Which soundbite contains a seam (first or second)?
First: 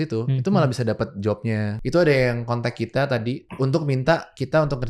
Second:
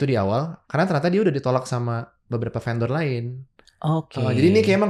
first